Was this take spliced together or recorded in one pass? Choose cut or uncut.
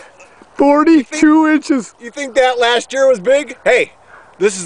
uncut